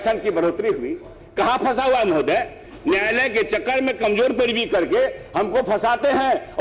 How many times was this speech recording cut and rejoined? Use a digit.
0